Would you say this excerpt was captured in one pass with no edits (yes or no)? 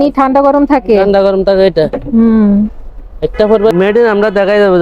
no